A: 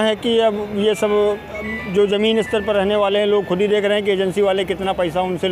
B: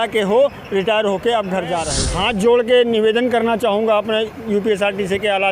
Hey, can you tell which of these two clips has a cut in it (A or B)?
B